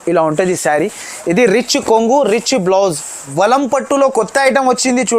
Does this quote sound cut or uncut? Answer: cut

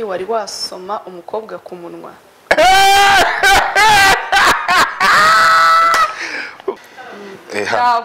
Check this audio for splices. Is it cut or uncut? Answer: cut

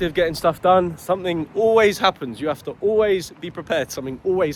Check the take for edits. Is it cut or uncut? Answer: uncut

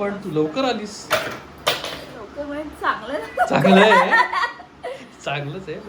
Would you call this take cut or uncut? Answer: uncut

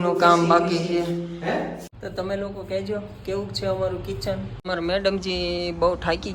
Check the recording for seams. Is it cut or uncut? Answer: cut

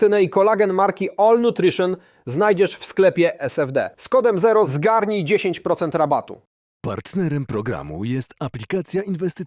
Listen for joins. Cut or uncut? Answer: uncut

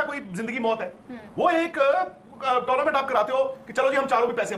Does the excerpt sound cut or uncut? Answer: uncut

